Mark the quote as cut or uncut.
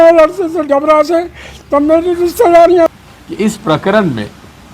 cut